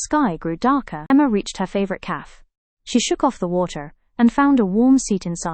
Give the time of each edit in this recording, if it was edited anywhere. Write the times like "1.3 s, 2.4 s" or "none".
1.0 s